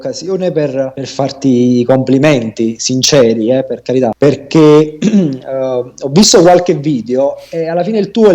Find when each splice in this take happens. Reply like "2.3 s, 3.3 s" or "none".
1.0 s, 4.1 s